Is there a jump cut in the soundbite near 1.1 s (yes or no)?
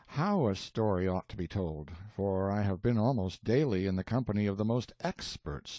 yes